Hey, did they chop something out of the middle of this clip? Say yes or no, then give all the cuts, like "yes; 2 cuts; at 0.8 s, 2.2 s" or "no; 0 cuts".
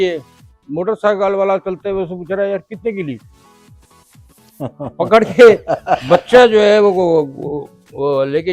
no; 0 cuts